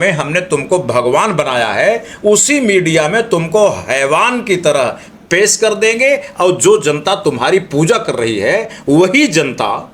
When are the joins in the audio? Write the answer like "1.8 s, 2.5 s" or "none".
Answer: none